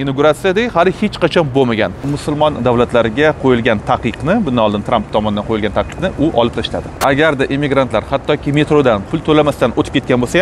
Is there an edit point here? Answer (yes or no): yes